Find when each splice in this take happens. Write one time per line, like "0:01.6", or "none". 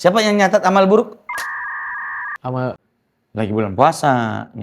0:02.8